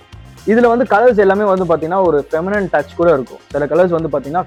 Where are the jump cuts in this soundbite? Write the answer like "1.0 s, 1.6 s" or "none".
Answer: none